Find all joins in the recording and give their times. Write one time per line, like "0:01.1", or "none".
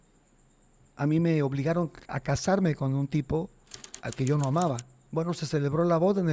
0:05.0